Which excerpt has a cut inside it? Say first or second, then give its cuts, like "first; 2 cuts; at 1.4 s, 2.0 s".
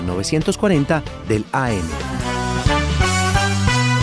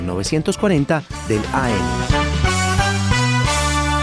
second; 1 cut; at 1.8 s